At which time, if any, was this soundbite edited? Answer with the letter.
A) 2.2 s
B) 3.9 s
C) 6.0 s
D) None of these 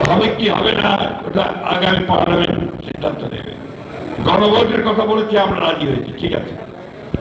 B